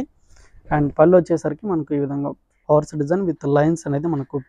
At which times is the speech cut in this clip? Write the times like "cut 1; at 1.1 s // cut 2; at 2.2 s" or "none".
none